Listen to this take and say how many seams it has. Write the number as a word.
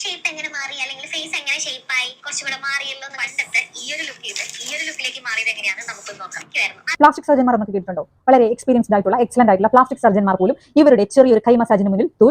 one